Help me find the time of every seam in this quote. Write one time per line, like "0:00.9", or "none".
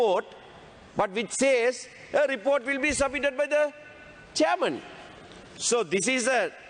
none